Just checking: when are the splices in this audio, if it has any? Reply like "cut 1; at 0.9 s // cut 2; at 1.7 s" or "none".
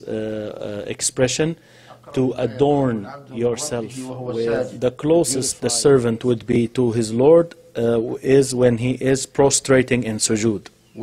cut 1; at 4.6 s